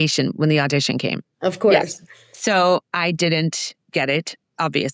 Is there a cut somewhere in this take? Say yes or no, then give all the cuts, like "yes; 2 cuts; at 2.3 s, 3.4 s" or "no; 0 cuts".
yes; 1 cut; at 1.3 s